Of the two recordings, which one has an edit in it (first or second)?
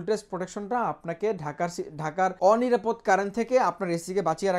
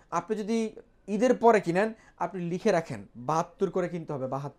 first